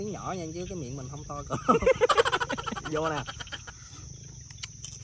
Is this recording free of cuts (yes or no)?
yes